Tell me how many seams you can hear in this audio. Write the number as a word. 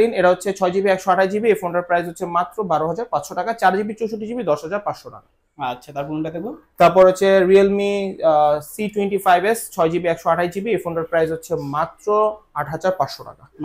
zero